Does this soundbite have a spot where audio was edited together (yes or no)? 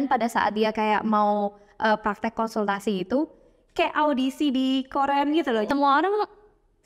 yes